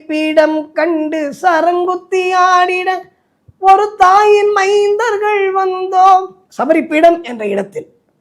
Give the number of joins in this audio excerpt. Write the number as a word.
one